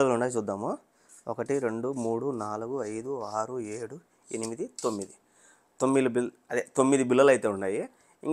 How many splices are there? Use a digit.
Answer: 0